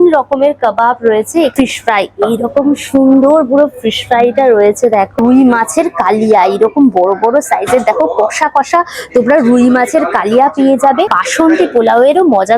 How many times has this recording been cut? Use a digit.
3